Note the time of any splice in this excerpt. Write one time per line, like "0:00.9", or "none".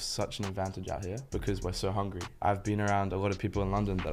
0:01.2
0:02.4